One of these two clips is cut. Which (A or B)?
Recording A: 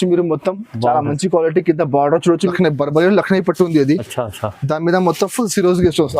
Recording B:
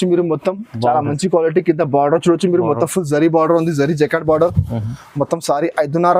A